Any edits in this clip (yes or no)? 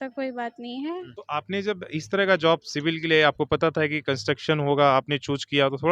yes